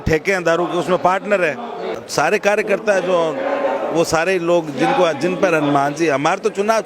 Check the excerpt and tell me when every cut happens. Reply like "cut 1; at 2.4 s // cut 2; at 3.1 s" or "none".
cut 1; at 1.9 s